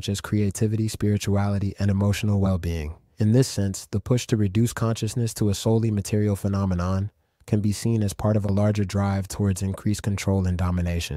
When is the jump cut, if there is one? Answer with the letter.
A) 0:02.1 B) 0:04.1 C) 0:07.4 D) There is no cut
D